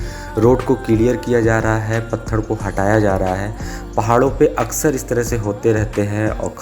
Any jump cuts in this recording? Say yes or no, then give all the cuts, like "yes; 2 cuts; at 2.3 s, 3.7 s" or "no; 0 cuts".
no; 0 cuts